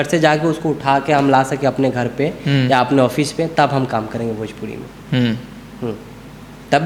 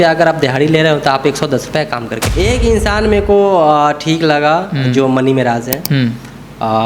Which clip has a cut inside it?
second; 1 cut; at 2.2 s

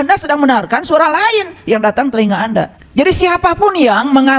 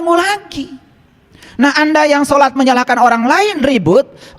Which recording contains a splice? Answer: first; 1 cut; at 2.8 s

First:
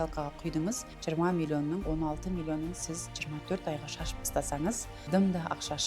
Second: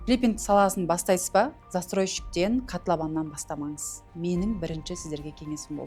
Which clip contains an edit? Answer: first; 3 cuts; at 0.9 s, 1.8 s, 4.9 s

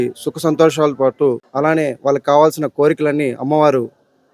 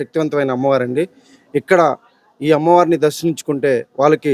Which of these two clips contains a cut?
first; 1 cut; at 1.5 s

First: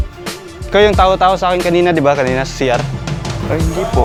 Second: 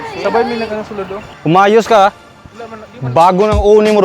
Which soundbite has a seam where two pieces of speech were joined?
second; 1 cut; at 1.3 s

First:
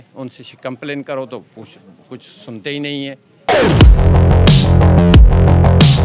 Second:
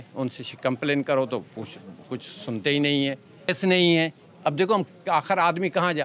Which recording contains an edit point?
first; 1 cut; at 3.4 s

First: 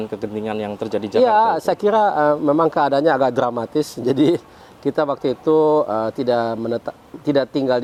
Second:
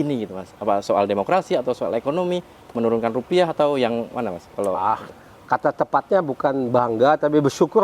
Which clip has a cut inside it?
second; 1 cut; at 5.0 s

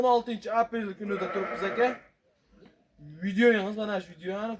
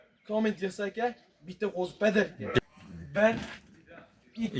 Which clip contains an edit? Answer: second; 1 cut; at 2.6 s

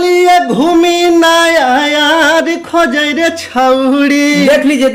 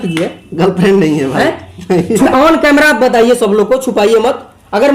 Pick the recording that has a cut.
second; 1 cut; at 2.3 s

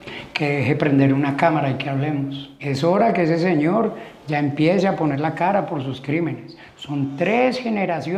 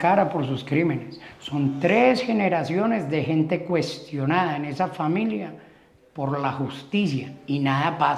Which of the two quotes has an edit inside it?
first; 1 cut; at 2.5 s

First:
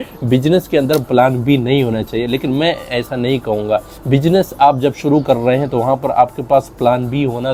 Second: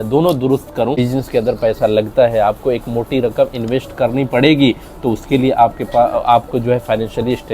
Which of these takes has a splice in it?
second; 1 cut; at 1.0 s

